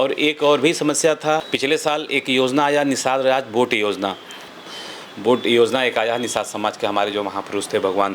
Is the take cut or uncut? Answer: cut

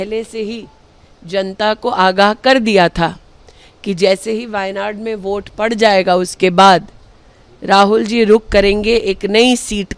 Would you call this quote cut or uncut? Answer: uncut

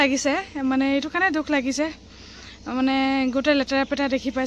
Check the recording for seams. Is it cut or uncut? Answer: uncut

